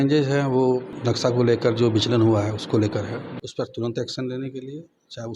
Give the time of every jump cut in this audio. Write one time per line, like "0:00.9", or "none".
0:00.9
0:03.4